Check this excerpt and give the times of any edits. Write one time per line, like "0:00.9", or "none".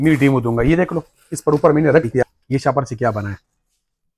0:02.2